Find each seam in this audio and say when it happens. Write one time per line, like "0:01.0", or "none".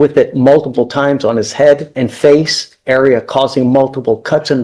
0:01.9